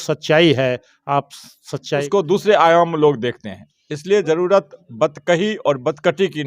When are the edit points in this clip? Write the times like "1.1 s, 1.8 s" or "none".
2.0 s